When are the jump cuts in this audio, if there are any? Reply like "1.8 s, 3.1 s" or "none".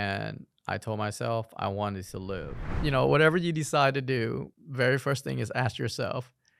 2.7 s